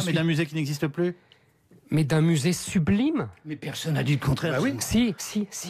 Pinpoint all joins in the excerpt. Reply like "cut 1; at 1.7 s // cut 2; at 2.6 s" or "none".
none